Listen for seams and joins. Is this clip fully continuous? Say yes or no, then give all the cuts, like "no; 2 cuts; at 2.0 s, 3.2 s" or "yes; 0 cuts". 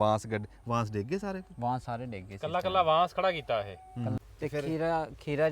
no; 1 cut; at 4.2 s